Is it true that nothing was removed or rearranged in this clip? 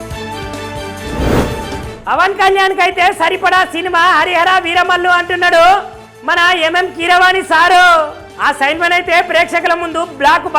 no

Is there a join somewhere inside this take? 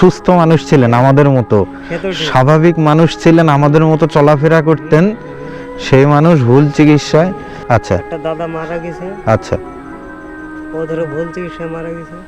yes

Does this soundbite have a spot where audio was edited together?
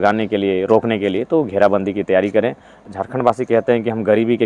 yes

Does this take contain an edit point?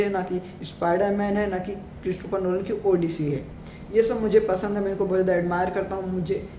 no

